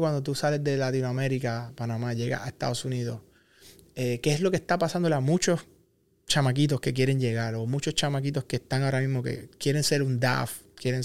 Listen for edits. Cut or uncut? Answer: uncut